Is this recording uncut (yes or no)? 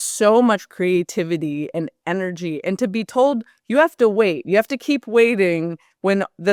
yes